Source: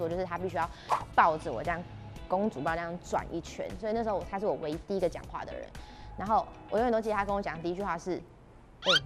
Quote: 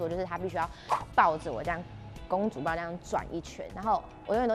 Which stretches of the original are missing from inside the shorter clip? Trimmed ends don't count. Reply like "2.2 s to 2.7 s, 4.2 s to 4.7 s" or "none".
3.6 s to 6.1 s